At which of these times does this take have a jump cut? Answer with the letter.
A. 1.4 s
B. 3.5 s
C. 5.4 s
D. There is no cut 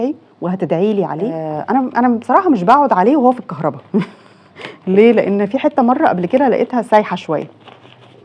A